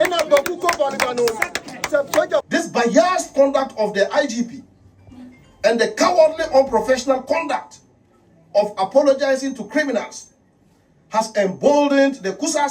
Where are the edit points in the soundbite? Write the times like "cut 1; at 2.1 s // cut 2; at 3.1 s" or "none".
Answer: cut 1; at 2.4 s